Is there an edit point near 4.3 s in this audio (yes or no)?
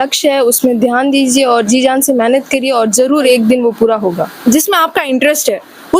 yes